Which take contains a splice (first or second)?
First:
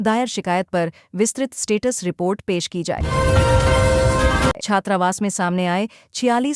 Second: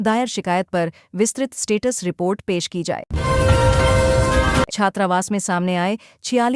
first